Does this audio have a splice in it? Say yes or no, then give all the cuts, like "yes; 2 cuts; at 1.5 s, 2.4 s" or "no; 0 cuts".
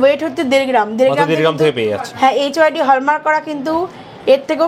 no; 0 cuts